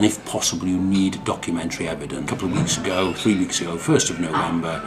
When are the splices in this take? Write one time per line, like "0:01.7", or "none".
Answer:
none

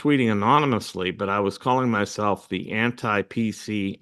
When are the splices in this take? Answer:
none

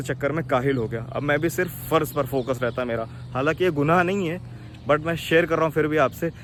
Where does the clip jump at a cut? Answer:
none

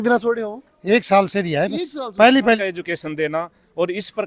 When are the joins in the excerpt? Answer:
0:02.6

